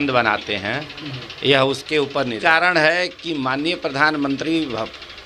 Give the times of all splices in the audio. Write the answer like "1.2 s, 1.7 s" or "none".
2.4 s